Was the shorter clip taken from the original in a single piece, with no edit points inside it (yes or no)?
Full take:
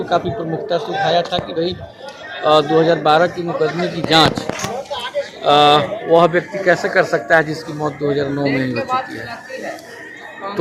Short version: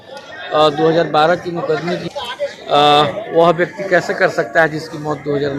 no